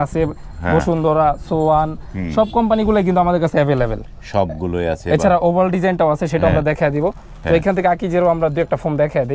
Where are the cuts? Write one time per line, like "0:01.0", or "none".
none